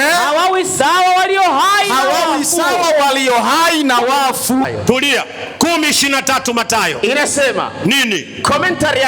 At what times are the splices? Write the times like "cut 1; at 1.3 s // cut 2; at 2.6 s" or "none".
cut 1; at 4.7 s